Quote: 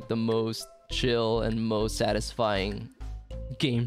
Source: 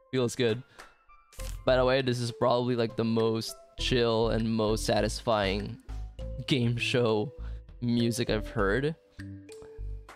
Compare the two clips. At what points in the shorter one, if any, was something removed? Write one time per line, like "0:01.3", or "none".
none